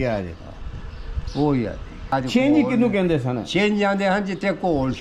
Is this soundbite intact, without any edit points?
no; 1 cut; at 2.1 s

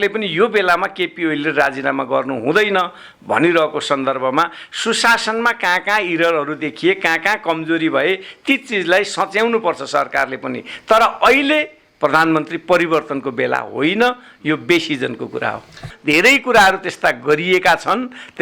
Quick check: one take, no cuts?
no; 1 cut; at 15.9 s

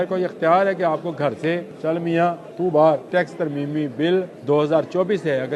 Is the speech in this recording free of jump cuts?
no; 4 cuts; at 1.7 s, 2.5 s, 3.1 s, 4.3 s

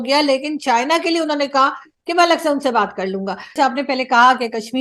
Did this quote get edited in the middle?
yes; 1 cut; at 3.5 s

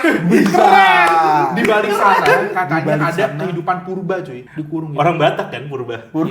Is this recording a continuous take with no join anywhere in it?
no; 1 cut; at 4.4 s

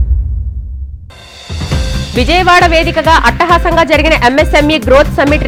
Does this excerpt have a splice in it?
no; 0 cuts

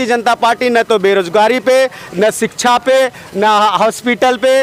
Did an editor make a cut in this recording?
no; 0 cuts

